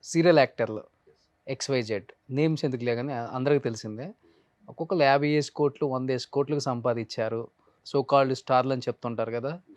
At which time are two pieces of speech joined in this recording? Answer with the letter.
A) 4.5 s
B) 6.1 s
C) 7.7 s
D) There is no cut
C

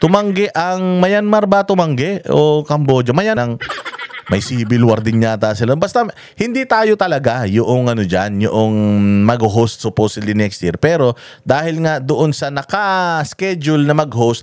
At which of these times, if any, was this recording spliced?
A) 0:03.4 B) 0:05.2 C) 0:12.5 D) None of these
A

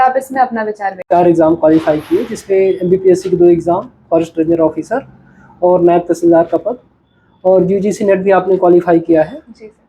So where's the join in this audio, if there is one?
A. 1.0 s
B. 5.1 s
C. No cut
A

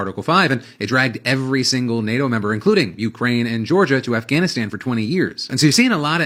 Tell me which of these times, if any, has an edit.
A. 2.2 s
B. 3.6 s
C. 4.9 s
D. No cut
D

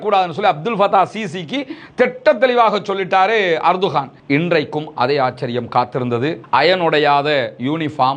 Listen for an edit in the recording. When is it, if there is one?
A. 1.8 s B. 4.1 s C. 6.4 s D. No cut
B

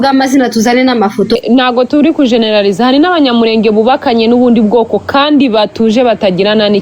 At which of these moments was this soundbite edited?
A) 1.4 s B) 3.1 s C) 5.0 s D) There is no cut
A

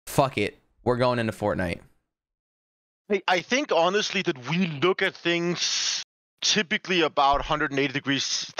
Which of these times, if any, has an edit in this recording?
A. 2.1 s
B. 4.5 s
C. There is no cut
C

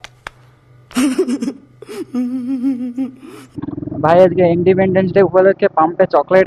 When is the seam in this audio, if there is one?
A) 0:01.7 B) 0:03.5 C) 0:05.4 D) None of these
B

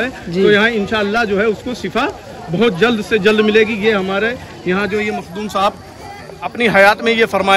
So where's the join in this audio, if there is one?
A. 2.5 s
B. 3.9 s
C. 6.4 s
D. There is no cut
C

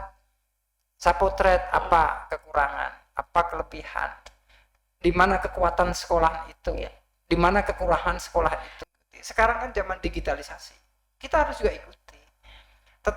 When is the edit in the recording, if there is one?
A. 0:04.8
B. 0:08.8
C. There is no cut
B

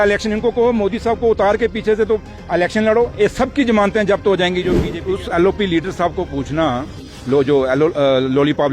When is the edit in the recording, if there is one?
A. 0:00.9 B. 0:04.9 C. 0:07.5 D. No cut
B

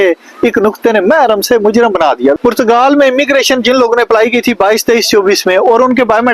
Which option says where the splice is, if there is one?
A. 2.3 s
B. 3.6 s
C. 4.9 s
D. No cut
A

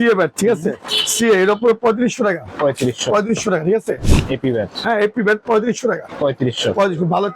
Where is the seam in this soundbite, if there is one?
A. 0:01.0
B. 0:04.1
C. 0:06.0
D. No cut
B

